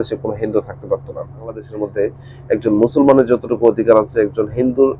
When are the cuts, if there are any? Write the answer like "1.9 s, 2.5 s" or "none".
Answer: 1.8 s